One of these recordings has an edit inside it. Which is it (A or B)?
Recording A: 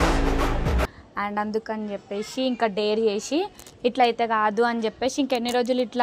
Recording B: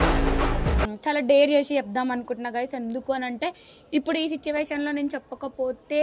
B